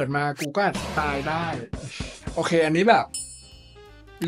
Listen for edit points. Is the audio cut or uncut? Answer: uncut